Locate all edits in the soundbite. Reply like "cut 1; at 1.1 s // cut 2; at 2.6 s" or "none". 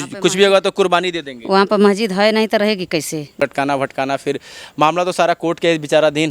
none